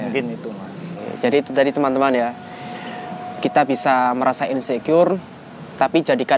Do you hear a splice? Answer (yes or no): yes